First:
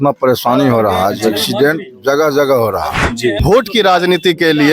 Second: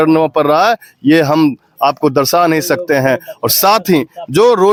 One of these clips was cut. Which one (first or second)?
first